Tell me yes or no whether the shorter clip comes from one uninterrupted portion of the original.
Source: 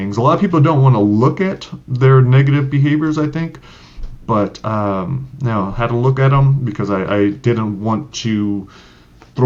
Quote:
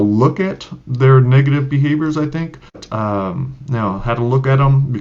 no